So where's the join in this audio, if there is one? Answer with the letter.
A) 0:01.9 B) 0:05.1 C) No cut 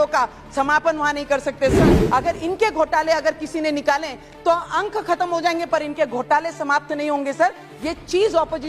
A